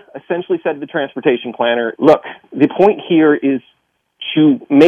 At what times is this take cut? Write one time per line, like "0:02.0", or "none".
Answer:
0:01.9